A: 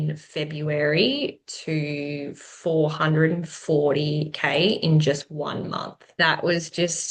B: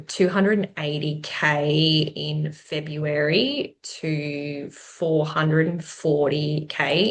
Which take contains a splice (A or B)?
A